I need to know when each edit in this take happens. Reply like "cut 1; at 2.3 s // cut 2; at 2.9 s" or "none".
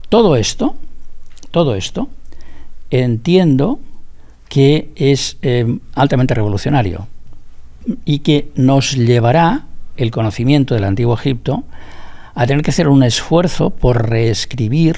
none